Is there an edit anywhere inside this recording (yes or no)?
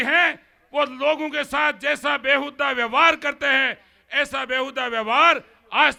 no